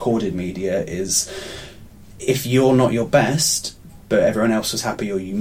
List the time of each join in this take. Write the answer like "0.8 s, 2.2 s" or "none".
none